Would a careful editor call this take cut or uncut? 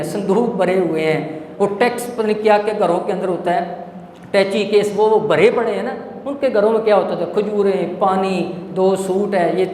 uncut